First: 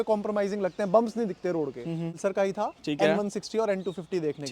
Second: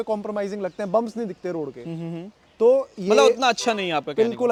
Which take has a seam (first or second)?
first